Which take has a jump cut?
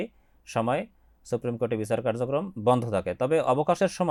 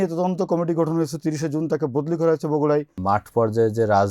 second; 1 cut; at 3.0 s

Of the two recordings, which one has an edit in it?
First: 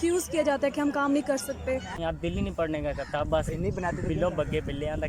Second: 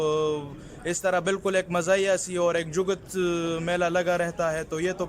first; 1 cut; at 1.9 s

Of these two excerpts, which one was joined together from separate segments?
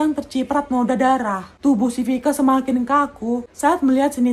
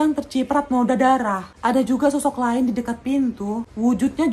second; 1 cut; at 1.5 s

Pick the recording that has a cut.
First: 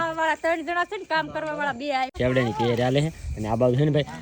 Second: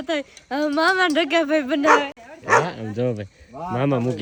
first; 1 cut; at 2.1 s

